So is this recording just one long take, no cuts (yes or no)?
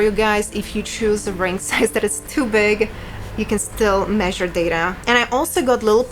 no